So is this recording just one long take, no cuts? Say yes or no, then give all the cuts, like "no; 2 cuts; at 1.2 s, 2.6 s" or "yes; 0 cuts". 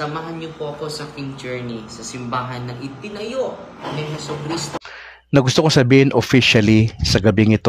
no; 1 cut; at 4.8 s